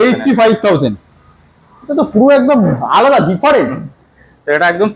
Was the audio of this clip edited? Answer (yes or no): no